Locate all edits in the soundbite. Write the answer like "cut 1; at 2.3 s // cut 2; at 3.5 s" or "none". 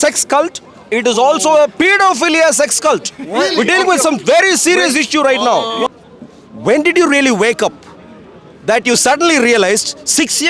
cut 1; at 5.9 s